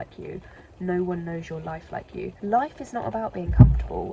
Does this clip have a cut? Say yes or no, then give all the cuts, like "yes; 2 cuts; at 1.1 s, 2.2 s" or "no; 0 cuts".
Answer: yes; 1 cut; at 2.3 s